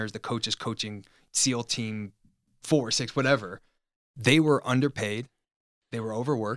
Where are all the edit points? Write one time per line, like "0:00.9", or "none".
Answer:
0:01.2
0:02.5